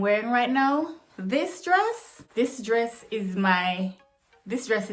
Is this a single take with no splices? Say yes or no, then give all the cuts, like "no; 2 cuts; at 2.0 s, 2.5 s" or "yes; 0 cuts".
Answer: no; 1 cut; at 2.2 s